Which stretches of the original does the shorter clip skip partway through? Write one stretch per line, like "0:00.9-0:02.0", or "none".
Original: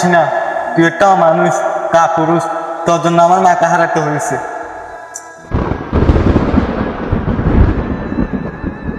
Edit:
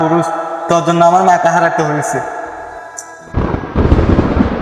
none